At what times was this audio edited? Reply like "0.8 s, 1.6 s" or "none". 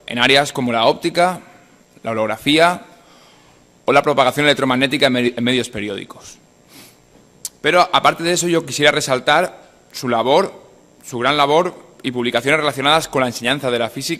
12.6 s